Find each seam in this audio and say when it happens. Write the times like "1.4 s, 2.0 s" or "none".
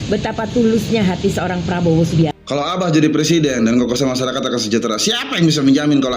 2.2 s